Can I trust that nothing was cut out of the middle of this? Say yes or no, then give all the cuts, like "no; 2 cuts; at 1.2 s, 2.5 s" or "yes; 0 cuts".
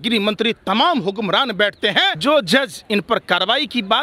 no; 1 cut; at 2.2 s